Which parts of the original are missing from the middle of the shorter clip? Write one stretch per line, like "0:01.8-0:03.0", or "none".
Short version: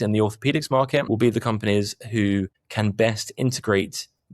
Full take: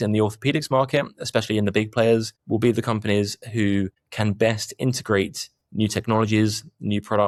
0:01.1-0:02.5